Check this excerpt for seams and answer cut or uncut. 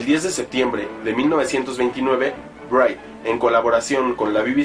cut